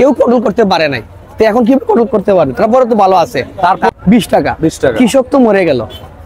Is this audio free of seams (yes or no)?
no